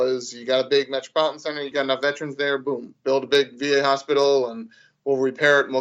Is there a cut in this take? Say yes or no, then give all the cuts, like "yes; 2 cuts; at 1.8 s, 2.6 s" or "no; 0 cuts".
yes; 1 cut; at 1.7 s